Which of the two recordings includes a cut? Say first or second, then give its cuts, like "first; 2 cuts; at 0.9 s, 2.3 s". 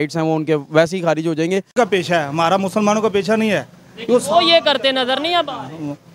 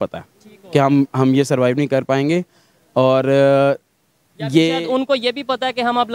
first; 1 cut; at 1.7 s